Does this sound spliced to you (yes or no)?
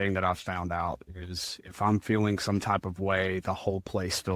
no